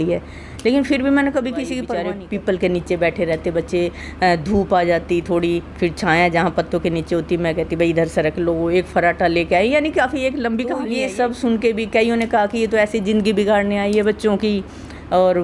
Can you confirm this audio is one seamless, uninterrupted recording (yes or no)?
no